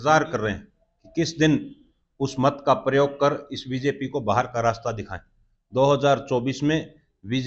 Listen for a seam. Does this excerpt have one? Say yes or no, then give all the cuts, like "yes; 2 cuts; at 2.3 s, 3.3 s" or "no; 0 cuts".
no; 0 cuts